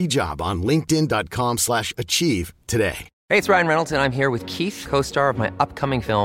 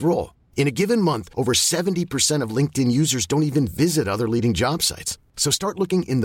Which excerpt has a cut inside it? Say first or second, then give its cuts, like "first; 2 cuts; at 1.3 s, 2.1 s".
first; 1 cut; at 3.1 s